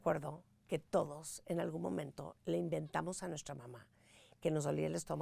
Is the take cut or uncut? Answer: uncut